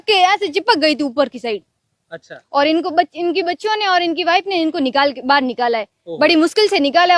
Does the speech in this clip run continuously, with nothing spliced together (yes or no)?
yes